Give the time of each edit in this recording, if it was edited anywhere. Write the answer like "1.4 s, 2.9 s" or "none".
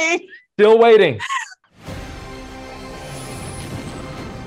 1.7 s